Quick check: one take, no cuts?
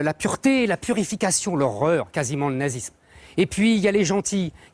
yes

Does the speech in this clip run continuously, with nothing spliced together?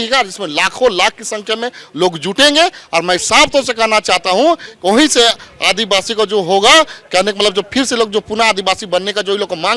yes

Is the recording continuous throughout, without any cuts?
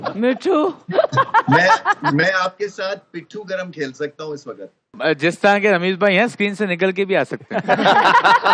no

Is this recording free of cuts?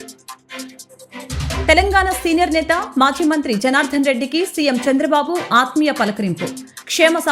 no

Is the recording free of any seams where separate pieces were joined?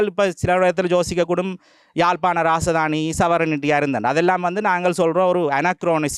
yes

